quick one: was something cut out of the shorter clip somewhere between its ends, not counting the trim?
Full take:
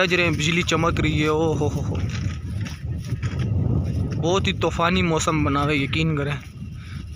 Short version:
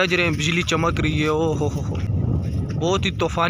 yes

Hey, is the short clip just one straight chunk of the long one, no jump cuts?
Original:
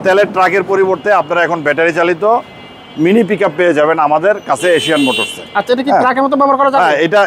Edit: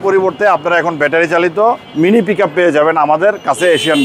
no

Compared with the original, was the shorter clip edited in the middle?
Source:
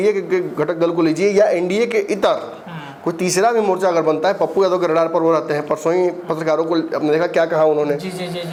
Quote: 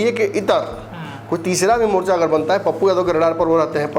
no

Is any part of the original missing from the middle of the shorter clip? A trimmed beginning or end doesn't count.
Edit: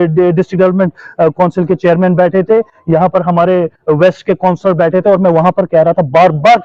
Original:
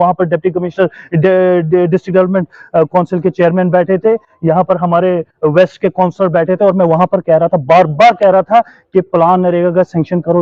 no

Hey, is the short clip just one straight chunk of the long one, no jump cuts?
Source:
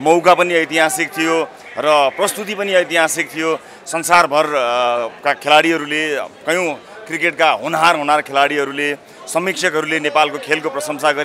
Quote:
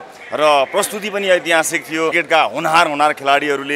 no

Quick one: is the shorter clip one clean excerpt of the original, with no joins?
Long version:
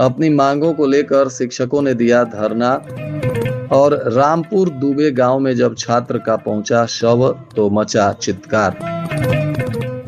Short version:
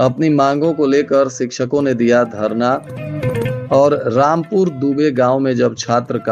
yes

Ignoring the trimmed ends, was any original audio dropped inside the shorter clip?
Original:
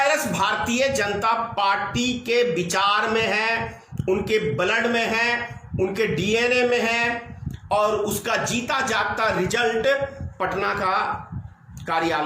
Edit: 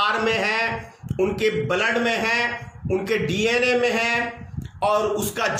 no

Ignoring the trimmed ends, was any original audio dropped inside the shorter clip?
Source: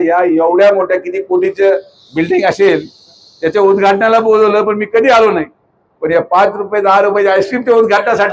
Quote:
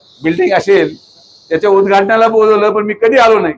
no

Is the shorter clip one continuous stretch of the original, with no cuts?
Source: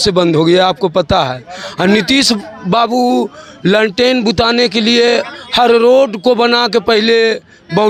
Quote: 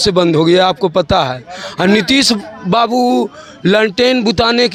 yes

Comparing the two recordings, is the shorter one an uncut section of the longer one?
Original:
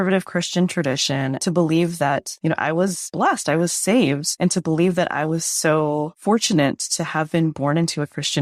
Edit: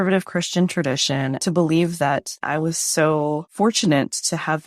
no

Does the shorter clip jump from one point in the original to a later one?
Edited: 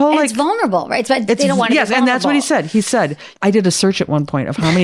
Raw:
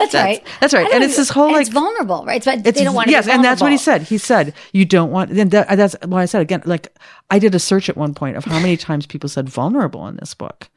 yes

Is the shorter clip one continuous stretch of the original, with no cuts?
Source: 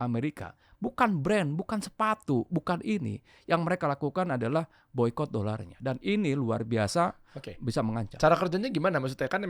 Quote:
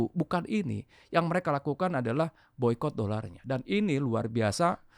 yes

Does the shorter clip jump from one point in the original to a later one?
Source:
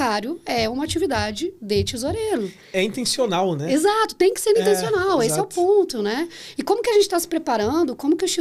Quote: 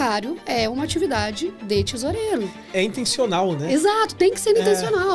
no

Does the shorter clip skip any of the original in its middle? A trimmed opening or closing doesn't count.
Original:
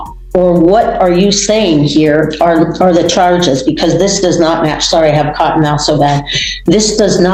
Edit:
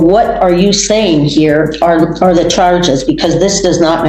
no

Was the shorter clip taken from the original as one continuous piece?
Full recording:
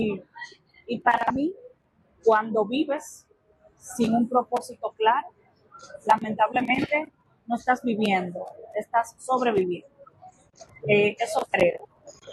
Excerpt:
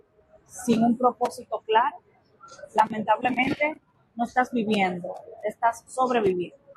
yes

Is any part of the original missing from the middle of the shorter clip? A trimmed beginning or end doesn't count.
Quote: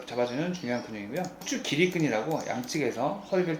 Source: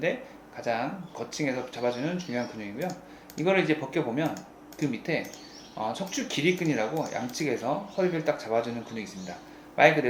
yes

